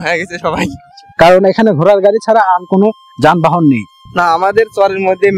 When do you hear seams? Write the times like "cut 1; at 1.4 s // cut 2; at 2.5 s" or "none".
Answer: cut 1; at 1.0 s // cut 2; at 4.0 s

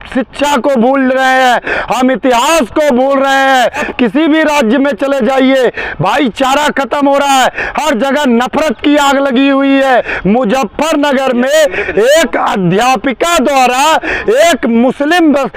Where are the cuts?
cut 1; at 3.9 s // cut 2; at 10.1 s

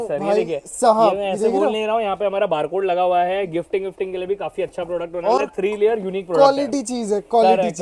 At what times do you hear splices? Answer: none

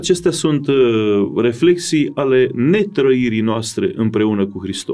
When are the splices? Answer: none

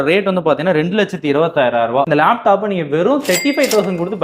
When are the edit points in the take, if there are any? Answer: cut 1; at 2.1 s

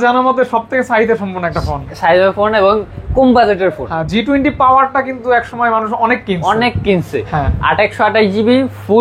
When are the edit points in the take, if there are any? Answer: none

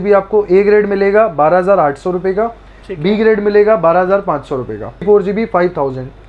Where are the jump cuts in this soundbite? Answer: cut 1; at 5.0 s

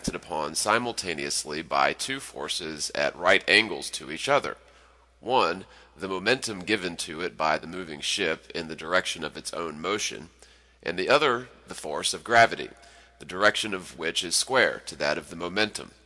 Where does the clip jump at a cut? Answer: cut 1; at 9.2 s

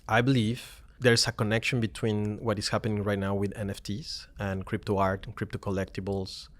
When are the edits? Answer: cut 1; at 1.0 s

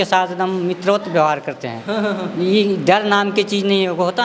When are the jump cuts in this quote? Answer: none

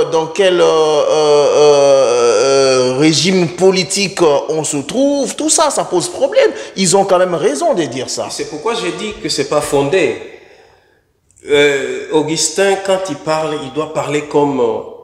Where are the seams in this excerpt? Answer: none

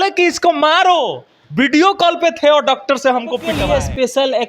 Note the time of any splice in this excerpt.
cut 1; at 3.5 s

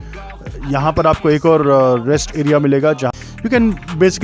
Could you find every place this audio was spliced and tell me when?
cut 1; at 3.1 s

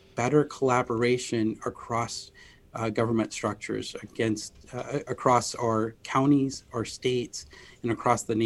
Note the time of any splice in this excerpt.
none

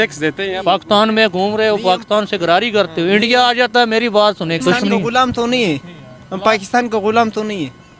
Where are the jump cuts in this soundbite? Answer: cut 1; at 4.6 s

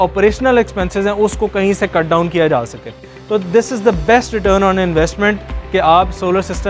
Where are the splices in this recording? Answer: cut 1; at 3.1 s

